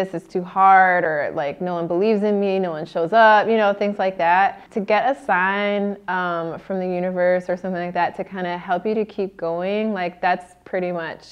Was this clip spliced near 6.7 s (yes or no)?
no